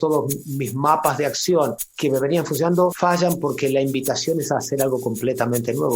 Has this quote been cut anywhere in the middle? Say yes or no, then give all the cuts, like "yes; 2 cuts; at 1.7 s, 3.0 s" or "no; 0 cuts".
yes; 2 cuts; at 1.9 s, 3.0 s